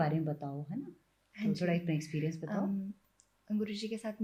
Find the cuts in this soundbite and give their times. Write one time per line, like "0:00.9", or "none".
none